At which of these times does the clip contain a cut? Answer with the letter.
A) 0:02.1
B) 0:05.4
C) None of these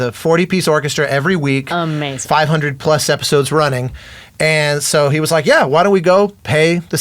A